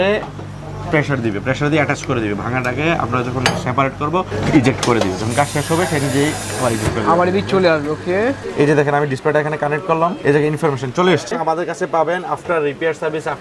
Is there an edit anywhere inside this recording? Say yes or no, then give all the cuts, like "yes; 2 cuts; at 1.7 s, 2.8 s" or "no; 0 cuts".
yes; 3 cuts; at 4.3 s, 8.4 s, 11.3 s